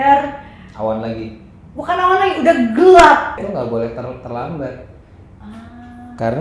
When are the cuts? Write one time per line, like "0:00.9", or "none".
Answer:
0:03.4